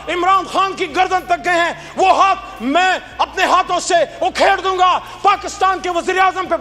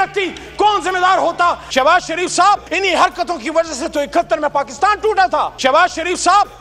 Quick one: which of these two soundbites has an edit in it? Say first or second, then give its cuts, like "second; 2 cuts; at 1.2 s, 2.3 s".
second; 3 cuts; at 1.6 s, 2.7 s, 5.5 s